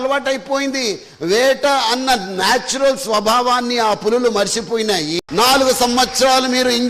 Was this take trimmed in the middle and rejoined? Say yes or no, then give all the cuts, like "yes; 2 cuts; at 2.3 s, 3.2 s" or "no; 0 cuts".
yes; 1 cut; at 5.2 s